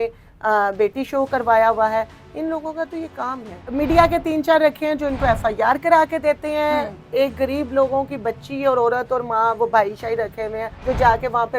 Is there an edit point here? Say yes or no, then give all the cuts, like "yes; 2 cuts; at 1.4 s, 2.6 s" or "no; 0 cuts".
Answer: yes; 2 cuts; at 3.7 s, 10.7 s